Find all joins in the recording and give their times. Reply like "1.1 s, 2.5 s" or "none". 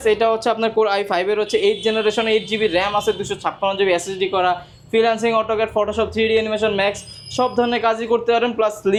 none

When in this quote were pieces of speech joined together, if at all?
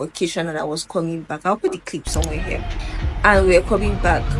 none

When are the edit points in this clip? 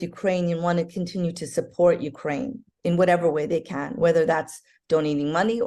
none

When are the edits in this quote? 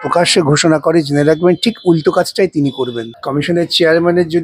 3.1 s

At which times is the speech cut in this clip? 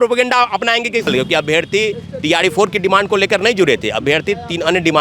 1.1 s

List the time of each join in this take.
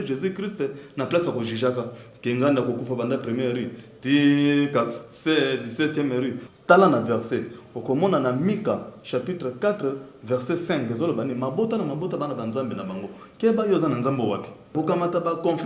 6.5 s, 14.7 s

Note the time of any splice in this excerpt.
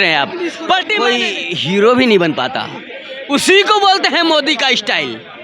1.0 s

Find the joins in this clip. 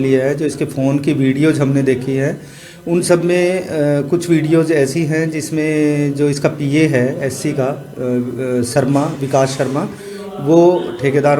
none

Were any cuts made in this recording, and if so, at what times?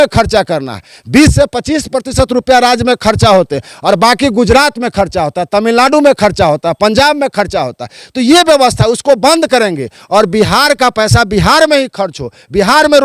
none

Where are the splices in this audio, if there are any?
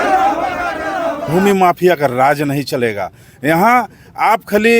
1.3 s

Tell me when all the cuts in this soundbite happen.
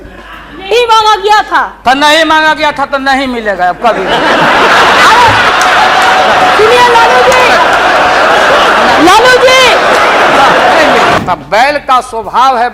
11.2 s

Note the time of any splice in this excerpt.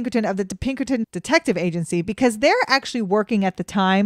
none

